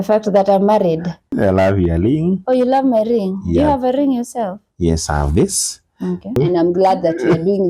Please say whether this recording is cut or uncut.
cut